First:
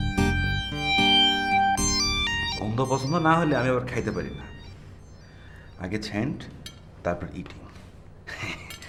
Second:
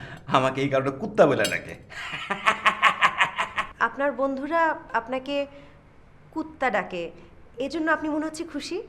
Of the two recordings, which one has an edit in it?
second; 1 cut; at 3.6 s

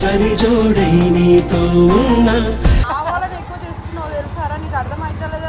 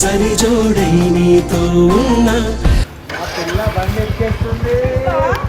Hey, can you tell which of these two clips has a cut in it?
second; 1 cut; at 2.8 s

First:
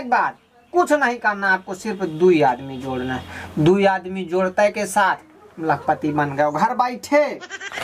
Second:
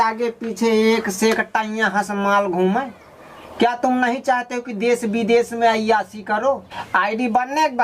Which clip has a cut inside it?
second; 1 cut; at 6.7 s

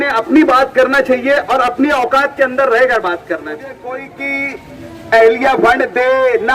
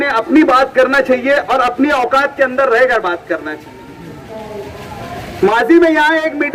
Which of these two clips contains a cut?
first; 1 cut; at 3.7 s

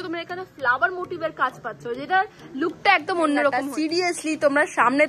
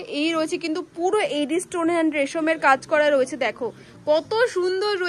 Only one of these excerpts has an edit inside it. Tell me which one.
first; 1 cut; at 3.6 s

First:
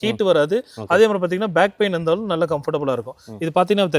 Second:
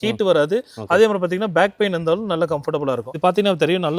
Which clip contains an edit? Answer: second; 1 cut; at 3.1 s

